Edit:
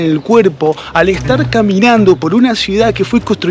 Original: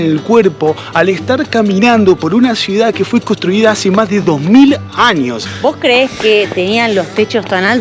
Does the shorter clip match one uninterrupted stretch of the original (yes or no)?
yes